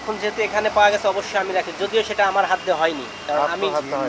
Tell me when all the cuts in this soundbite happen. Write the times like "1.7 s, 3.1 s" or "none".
none

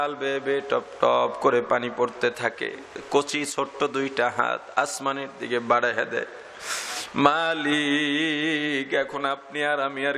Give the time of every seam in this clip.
3.0 s

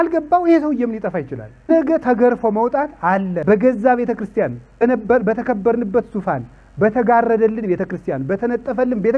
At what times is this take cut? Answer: 1.7 s, 3.4 s, 4.8 s

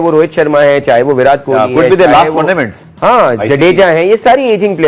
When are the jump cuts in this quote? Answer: none

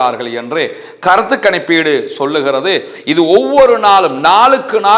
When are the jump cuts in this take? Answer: none

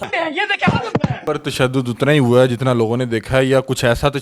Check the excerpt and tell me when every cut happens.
1.2 s

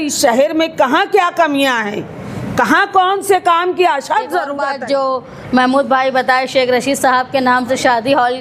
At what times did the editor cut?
4.6 s

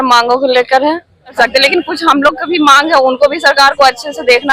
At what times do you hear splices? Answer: 1.3 s

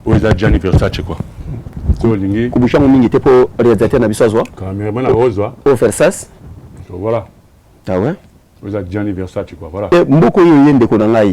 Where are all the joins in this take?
9.9 s

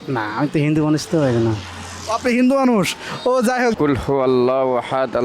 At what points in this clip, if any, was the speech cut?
3.8 s

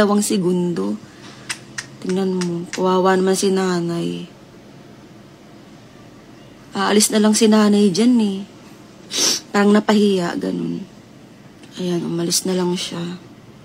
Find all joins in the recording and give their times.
10.8 s

